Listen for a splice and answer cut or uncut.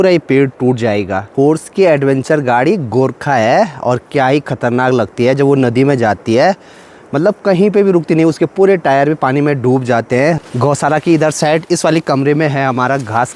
cut